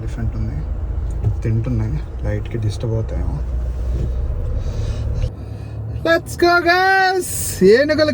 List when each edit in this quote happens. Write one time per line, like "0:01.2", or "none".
none